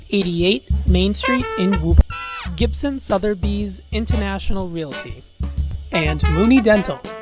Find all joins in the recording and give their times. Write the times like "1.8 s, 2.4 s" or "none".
2.0 s